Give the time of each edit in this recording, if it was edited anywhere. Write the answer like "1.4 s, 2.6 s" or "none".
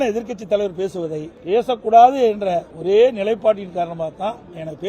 1.3 s, 2.7 s